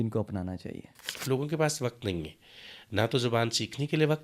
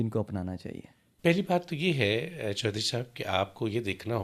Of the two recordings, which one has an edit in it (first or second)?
first